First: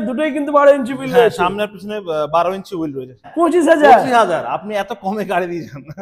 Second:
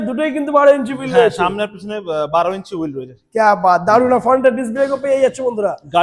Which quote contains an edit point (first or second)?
first